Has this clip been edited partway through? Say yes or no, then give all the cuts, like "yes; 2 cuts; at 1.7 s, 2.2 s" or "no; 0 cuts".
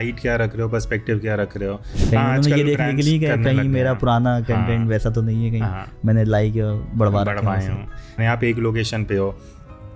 yes; 2 cuts; at 1.9 s, 8.2 s